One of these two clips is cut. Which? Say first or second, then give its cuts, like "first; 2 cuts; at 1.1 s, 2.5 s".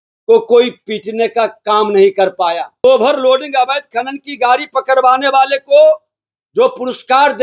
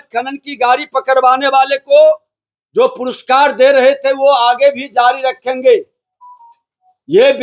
first; 1 cut; at 2.8 s